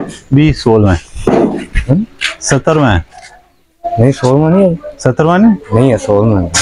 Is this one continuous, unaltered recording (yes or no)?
yes